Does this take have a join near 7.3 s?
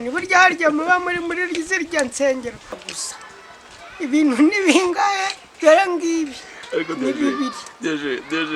no; 1 cut; at 2.7 s

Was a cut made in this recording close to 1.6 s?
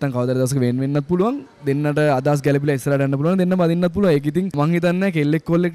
no; 1 cut; at 4.6 s

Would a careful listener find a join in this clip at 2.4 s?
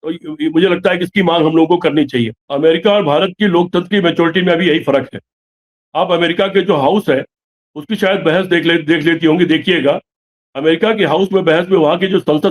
yes; 1 cut; at 2.4 s

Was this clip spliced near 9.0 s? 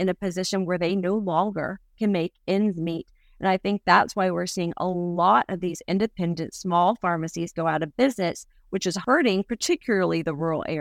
yes; 1 cut; at 9.0 s

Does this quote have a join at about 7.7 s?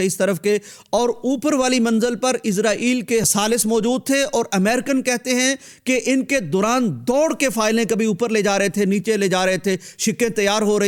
no; 0 cuts

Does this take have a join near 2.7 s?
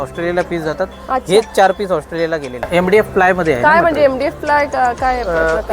yes; 1 cut; at 2.7 s

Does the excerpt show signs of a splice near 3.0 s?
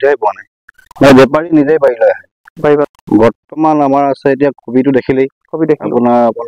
yes; 1 cut; at 3.0 s

